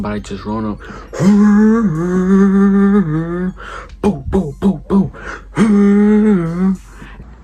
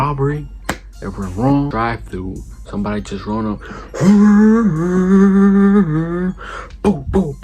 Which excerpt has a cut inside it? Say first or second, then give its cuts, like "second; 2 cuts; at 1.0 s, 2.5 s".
second; 1 cut; at 1.7 s